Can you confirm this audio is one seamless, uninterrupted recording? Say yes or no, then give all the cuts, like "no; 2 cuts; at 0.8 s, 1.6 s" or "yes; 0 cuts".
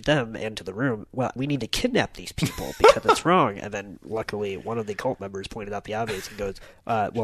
no; 1 cut; at 1.3 s